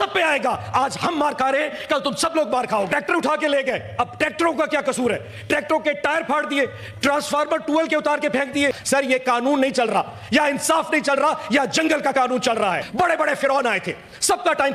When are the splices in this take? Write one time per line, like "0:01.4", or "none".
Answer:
0:02.9
0:08.8
0:12.9